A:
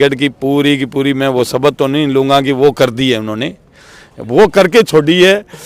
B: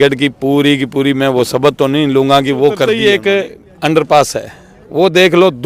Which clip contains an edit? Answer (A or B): B